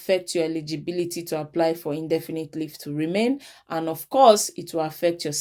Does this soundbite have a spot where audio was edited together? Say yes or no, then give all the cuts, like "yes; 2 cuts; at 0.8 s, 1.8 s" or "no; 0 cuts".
no; 0 cuts